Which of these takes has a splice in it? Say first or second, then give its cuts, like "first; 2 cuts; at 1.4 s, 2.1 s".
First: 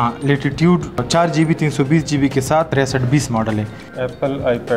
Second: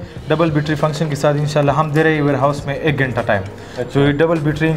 first; 3 cuts; at 1.0 s, 2.7 s, 3.8 s